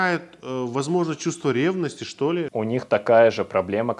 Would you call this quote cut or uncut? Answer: cut